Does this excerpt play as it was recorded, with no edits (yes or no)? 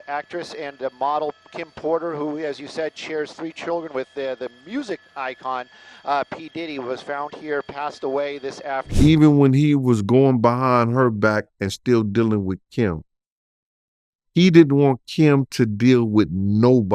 no